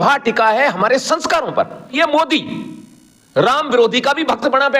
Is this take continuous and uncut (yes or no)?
no